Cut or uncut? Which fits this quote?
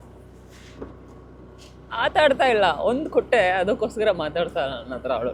uncut